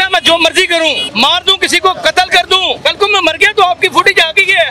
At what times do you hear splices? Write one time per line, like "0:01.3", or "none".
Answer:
0:01.0
0:02.8